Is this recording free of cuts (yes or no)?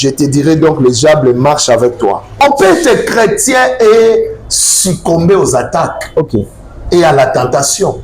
no